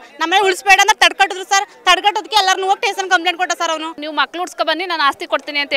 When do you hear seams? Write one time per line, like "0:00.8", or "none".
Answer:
0:04.0

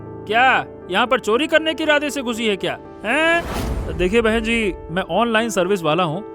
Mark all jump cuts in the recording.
0:03.6

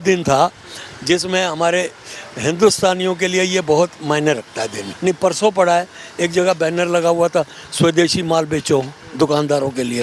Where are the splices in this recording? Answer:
0:04.8

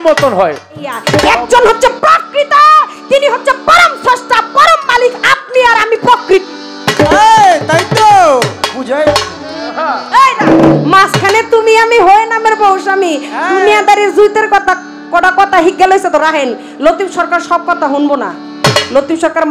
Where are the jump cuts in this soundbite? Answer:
0:01.0
0:09.1

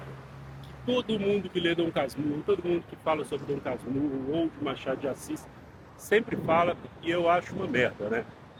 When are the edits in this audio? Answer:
none

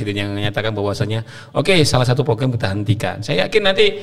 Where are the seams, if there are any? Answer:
none

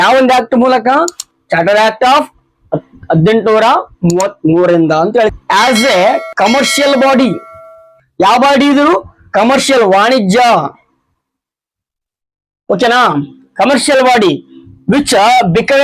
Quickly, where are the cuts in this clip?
0:05.3

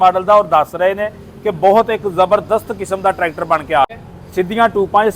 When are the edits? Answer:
0:03.9

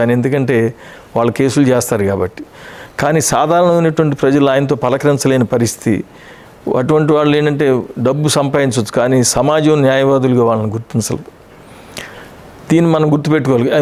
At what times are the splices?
none

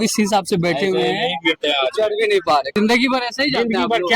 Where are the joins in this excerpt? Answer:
0:02.8

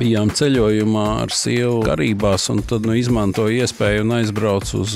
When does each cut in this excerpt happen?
0:01.9
0:02.8

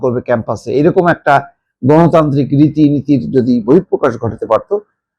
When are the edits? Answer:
none

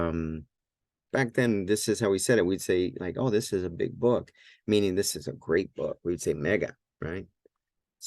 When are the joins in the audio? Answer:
0:01.0

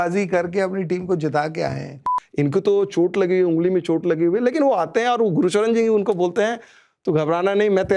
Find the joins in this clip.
0:02.0

